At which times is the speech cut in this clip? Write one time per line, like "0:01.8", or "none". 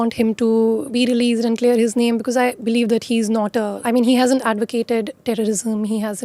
0:00.9
0:03.8